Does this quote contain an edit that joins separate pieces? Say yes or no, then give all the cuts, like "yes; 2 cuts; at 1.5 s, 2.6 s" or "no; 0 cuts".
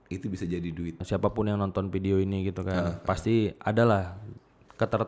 yes; 1 cut; at 1.0 s